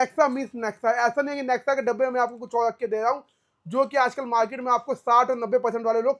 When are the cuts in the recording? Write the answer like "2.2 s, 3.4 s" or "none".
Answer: none